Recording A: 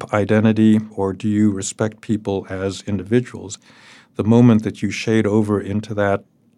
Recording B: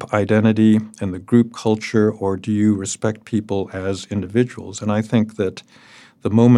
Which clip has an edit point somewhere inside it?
A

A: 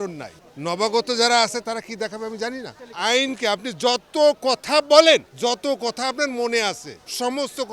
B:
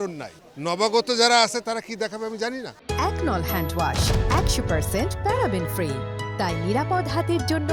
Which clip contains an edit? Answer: A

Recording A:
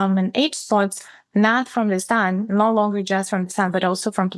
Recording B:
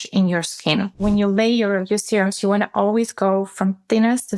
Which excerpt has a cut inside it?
B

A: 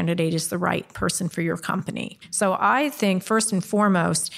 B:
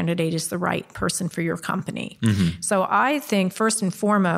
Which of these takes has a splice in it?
A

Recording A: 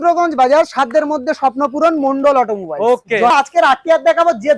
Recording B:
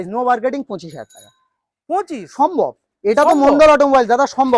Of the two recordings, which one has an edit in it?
A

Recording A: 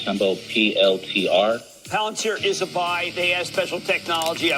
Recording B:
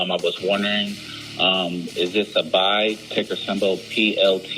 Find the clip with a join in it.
B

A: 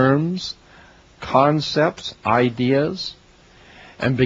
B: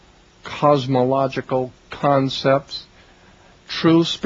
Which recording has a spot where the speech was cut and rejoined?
A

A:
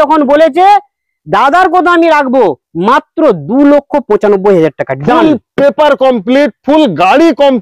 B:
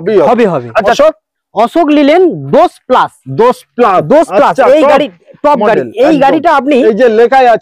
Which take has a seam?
B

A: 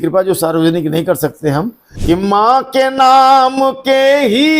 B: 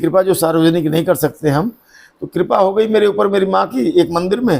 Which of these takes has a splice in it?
A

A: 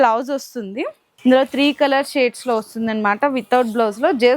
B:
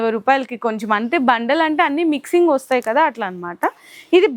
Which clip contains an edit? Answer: A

